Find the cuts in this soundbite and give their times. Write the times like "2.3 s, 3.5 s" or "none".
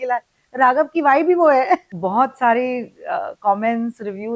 1.9 s